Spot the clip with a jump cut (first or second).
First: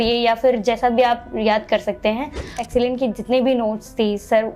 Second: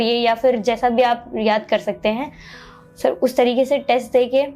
first